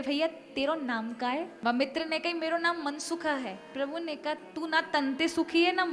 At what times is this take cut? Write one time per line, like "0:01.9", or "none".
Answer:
0:01.5